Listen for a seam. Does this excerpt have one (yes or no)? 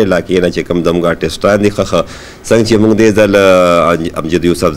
no